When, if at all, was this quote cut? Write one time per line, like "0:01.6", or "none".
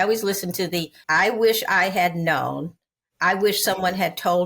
0:01.0